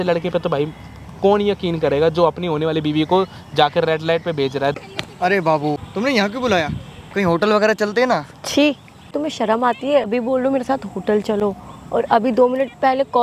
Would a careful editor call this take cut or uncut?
cut